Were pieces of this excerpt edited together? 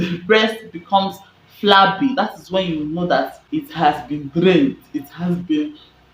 yes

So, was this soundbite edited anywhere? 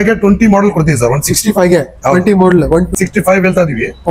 yes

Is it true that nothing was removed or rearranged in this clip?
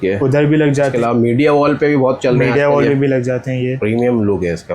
no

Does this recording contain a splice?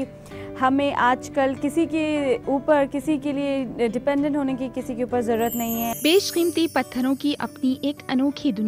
yes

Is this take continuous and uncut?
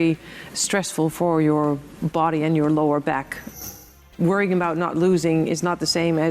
no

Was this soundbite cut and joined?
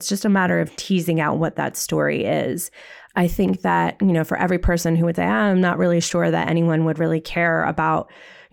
no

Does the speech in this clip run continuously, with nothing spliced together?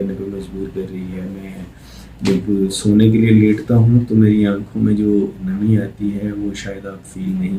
yes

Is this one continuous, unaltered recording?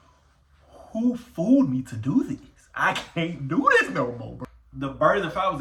yes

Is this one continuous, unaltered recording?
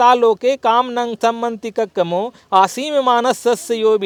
yes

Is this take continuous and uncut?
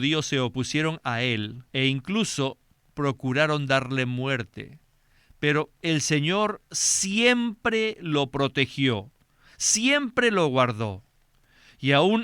no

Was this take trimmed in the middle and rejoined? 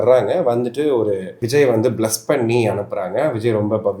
yes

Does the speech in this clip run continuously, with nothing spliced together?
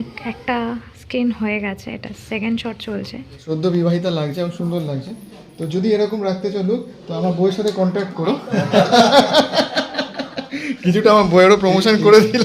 no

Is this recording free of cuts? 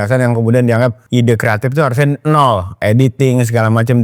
no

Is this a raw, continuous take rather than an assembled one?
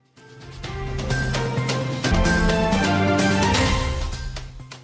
no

